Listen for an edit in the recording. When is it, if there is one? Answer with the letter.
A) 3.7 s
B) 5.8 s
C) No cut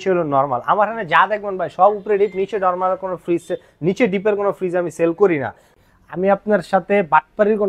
B